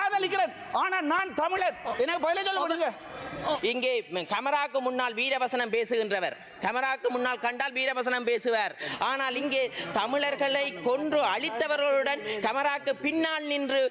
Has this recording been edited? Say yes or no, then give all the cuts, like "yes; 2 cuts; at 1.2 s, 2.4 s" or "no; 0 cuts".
yes; 1 cut; at 3.6 s